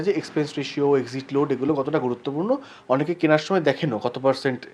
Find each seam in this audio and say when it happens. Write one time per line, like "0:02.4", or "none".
none